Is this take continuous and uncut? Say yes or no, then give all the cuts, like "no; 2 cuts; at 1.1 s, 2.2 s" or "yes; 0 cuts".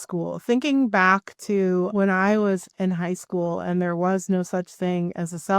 no; 1 cut; at 1.9 s